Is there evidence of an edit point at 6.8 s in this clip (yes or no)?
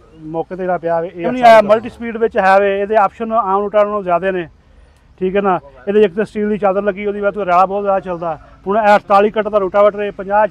no